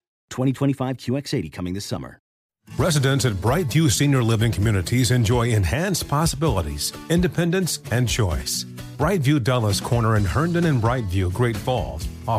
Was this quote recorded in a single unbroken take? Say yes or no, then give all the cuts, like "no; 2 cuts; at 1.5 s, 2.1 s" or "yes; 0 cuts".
no; 1 cut; at 2.4 s